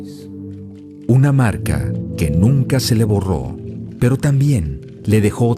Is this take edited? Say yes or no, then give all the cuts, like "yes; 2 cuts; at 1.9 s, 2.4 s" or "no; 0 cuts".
yes; 1 cut; at 3.2 s